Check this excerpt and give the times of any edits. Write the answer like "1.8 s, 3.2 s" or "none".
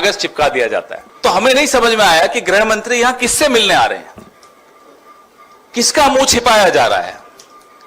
1.0 s

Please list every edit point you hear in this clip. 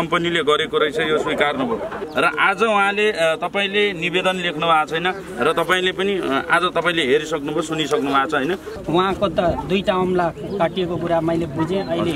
2.0 s, 8.7 s

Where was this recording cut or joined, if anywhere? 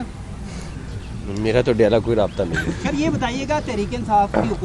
none

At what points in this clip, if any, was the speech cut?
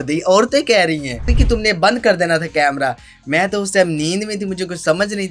1.3 s

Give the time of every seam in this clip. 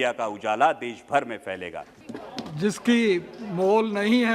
1.9 s

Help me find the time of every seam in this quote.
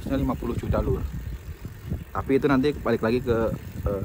none

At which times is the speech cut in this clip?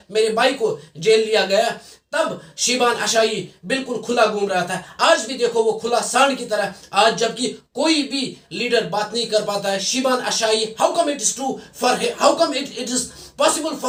none

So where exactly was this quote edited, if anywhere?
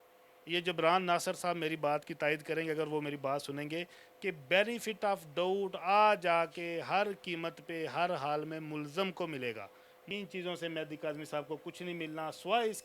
10.1 s

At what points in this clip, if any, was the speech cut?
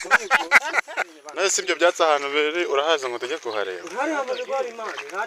1.2 s

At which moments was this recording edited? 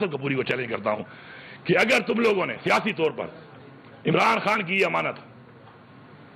none

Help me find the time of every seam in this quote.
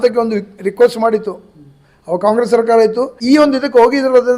3.2 s

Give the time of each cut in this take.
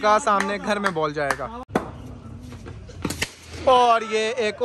1.6 s

